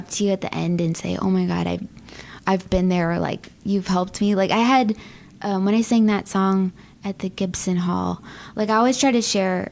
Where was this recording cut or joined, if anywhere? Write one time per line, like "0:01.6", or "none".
none